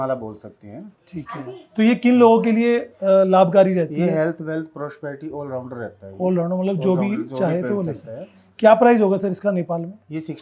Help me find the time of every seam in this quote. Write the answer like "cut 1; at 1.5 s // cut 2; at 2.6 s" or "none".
none

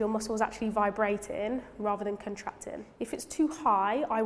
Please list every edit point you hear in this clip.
cut 1; at 2.8 s

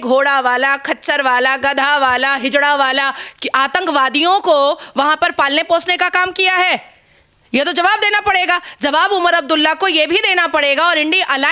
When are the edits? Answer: none

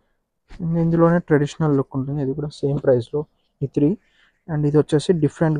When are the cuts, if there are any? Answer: none

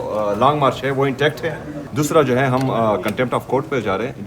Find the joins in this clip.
cut 1; at 1.8 s

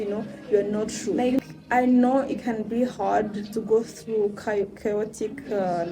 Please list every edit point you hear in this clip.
cut 1; at 1.2 s

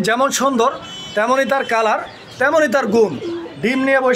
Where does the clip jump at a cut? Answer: none

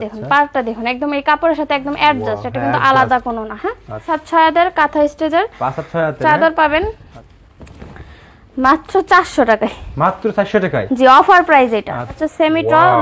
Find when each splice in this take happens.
cut 1; at 4.1 s // cut 2; at 7.1 s // cut 3; at 12.2 s

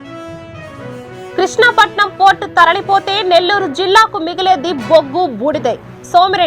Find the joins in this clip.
cut 1; at 1.1 s

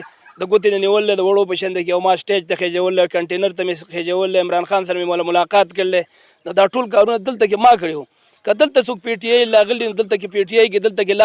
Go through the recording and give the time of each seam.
none

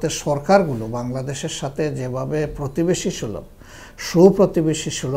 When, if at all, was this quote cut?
none

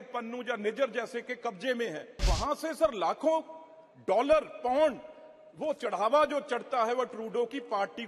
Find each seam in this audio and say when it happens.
cut 1; at 2.2 s

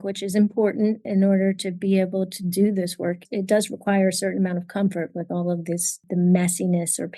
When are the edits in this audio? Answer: cut 1; at 1.0 s // cut 2; at 3.2 s // cut 3; at 6.0 s

